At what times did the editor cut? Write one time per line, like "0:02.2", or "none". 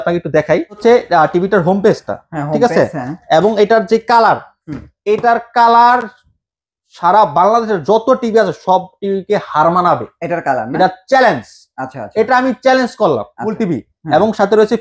0:00.8
0:13.5

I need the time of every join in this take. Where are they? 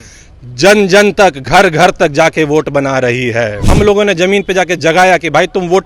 0:03.6

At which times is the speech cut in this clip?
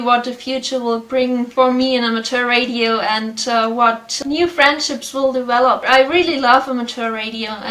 0:01.5
0:04.2
0:05.8

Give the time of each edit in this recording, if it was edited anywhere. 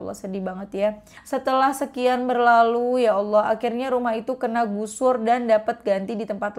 0:01.1

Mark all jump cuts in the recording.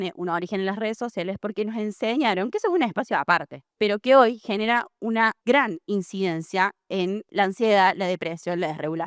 0:03.6
0:05.4
0:07.3

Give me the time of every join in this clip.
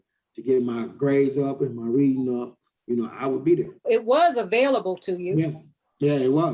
0:03.8

